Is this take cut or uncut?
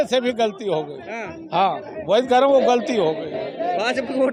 uncut